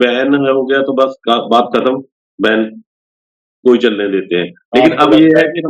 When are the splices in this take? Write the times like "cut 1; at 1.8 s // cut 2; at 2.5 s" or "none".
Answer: none